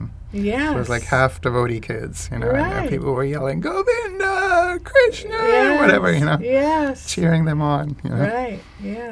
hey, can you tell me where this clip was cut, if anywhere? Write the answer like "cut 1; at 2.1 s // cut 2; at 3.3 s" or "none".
none